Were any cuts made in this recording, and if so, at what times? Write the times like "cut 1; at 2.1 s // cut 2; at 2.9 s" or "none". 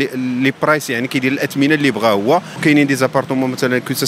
cut 1; at 2.6 s